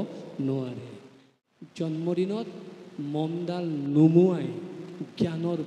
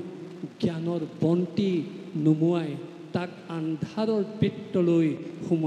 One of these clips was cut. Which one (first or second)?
first